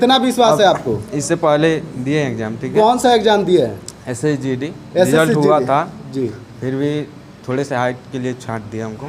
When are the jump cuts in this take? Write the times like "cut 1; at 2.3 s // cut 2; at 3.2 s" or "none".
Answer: none